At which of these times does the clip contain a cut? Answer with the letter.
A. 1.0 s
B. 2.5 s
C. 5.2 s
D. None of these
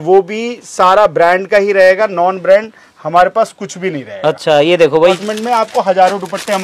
C